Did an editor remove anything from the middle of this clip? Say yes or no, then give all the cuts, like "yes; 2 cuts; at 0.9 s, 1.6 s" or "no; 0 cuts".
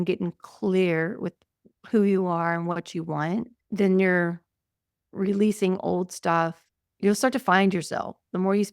yes; 2 cuts; at 3.6 s, 6.7 s